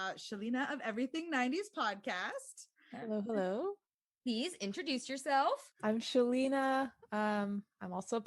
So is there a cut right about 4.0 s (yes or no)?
no